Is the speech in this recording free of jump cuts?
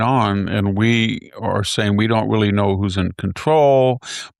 yes; 0 cuts

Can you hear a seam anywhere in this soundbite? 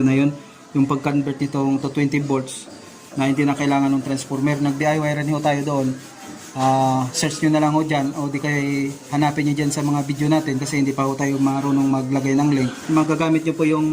yes; 1 cut; at 12.8 s

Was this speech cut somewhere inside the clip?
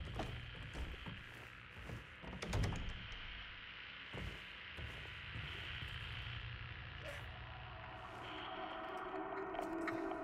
no; 0 cuts

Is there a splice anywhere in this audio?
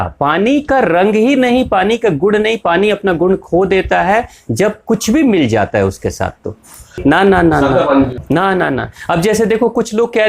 yes; 2 cuts; at 6.8 s, 8.2 s

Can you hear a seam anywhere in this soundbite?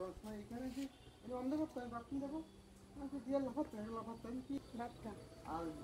yes; 1 cut; at 4.6 s

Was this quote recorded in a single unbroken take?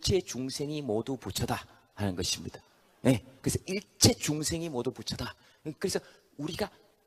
yes; 0 cuts

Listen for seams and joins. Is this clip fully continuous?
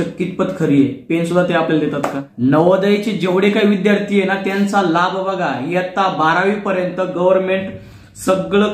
no; 1 cut; at 2.2 s

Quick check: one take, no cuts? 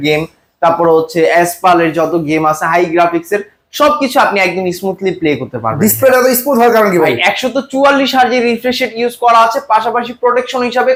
yes; 0 cuts

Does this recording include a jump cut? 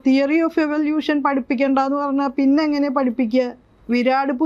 no; 0 cuts

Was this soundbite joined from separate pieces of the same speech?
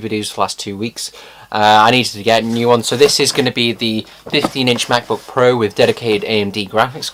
no; 0 cuts

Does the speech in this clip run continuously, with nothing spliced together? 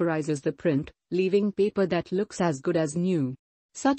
no; 1 cut; at 2.7 s

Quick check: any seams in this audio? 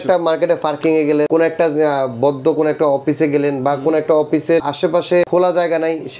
yes; 2 cuts; at 1.3 s, 5.0 s

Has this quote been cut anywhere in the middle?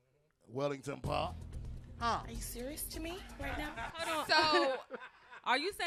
no; 0 cuts

